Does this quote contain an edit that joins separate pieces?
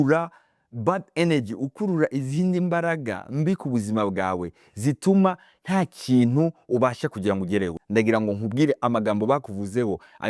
yes; 1 cut; at 7.7 s

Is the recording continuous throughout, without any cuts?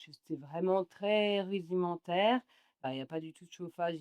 no; 1 cut; at 2.9 s

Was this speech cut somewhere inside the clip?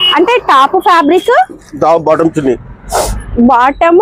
no; 0 cuts

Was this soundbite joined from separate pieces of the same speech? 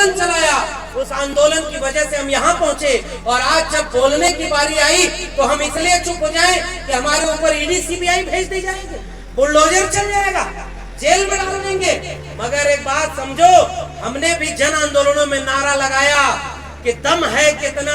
no; 0 cuts

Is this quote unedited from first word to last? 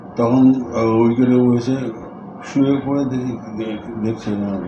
yes; 0 cuts

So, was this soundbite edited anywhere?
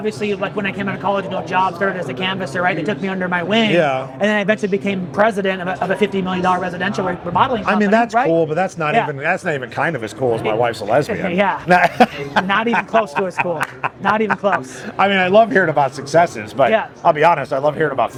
no; 0 cuts

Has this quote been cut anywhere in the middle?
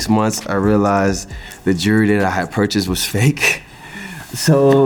no; 0 cuts

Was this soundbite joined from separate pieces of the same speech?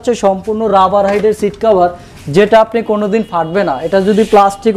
no; 0 cuts

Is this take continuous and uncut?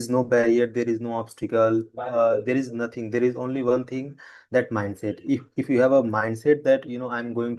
yes; 0 cuts

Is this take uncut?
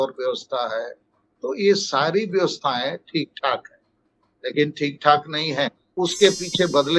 no; 1 cut; at 5.8 s

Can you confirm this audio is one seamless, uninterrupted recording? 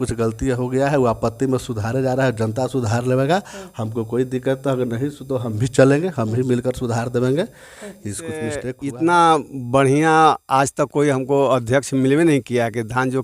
no; 1 cut; at 8.7 s

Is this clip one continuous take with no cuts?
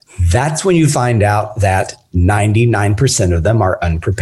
yes; 0 cuts

